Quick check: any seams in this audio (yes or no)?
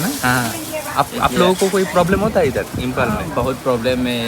no